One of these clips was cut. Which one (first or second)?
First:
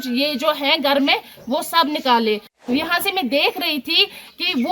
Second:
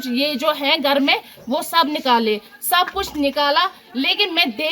first